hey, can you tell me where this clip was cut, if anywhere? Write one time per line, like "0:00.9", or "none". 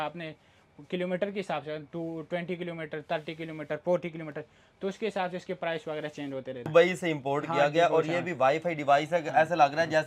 0:06.6